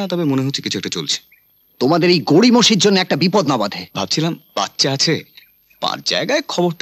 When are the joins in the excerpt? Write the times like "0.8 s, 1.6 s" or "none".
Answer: 3.8 s